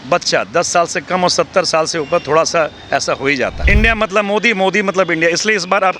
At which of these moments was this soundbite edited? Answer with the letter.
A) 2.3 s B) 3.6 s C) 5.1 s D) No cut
B